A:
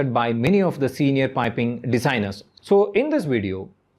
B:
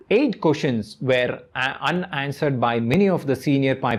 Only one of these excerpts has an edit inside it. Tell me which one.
A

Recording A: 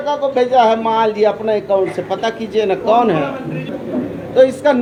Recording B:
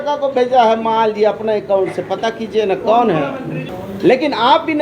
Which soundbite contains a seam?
B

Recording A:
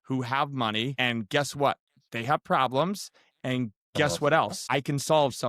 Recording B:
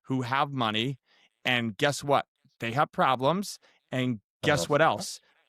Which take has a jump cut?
A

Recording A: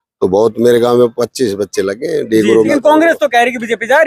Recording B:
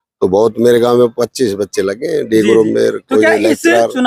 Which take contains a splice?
A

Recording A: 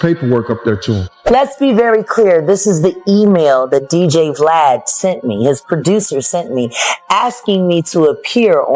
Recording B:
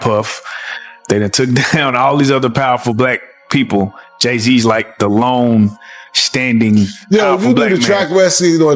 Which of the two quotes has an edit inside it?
A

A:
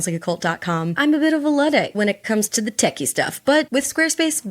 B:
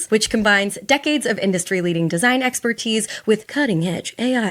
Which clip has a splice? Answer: A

